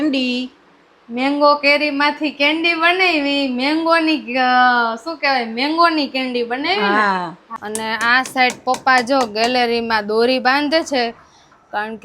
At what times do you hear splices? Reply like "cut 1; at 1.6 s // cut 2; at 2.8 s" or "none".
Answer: cut 1; at 7.5 s